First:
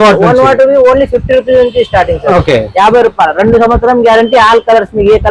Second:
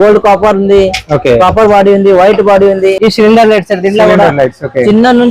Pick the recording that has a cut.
second; 1 cut; at 3.0 s

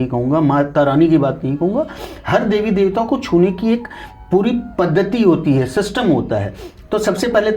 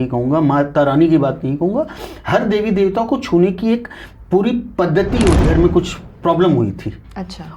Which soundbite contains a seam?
second; 1 cut; at 5.4 s

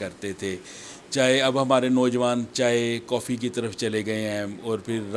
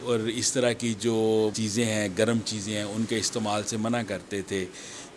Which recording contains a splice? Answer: second; 1 cut; at 1.6 s

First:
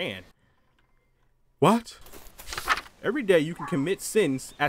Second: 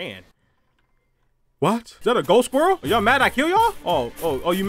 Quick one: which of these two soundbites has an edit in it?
second; 3 cuts; at 1.9 s, 2.8 s, 3.8 s

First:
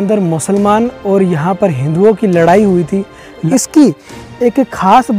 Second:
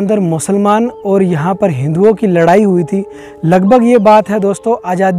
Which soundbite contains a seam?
first; 1 cut; at 3.5 s

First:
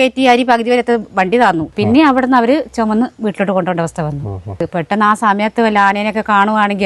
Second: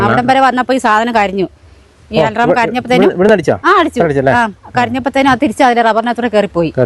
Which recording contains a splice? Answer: first; 2 cuts; at 1.7 s, 4.6 s

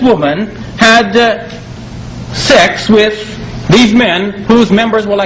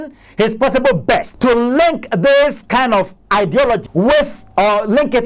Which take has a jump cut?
second; 2 cuts; at 1.3 s, 3.9 s

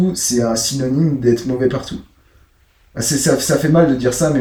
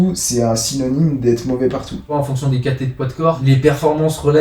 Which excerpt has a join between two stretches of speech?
second; 2 cuts; at 2.1 s, 3.4 s

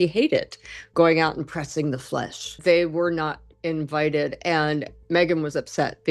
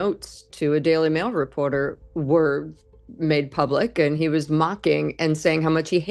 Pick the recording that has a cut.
first; 1 cut; at 2.5 s

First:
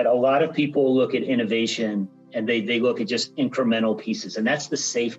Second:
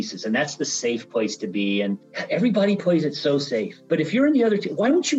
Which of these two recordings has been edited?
second; 2 cuts; at 2.1 s, 3.7 s

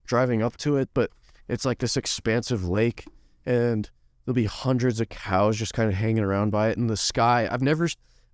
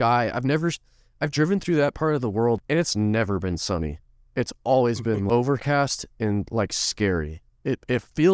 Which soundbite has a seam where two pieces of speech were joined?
second; 2 cuts; at 2.6 s, 5.2 s

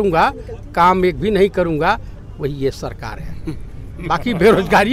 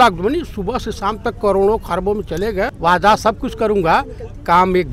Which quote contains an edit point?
second; 1 cut; at 2.7 s

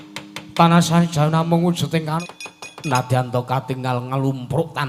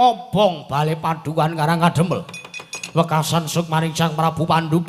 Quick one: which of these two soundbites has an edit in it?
first; 1 cut; at 2.0 s

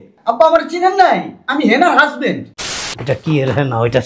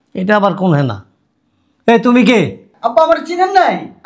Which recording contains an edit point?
first; 1 cut; at 2.7 s

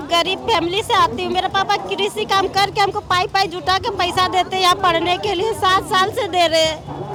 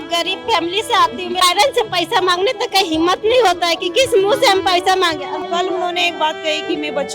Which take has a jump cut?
second; 2 cuts; at 1.4 s, 5.3 s

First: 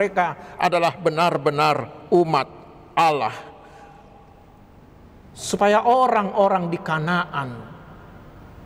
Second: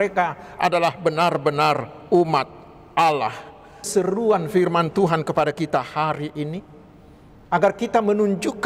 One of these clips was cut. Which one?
second; 1 cut; at 3.9 s

